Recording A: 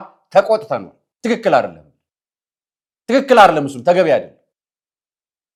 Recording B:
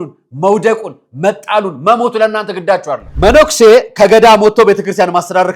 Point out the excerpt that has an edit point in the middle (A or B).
B